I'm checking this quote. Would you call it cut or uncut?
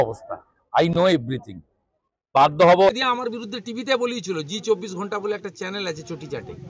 cut